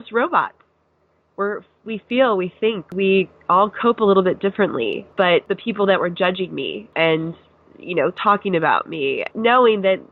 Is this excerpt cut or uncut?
cut